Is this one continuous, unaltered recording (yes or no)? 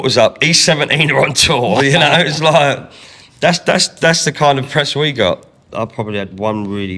no